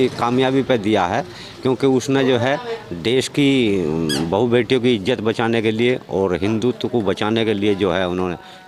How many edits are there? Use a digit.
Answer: 0